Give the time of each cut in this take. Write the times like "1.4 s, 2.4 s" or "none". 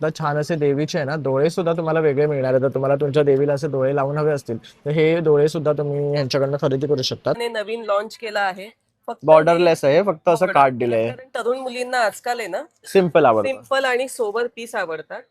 7.4 s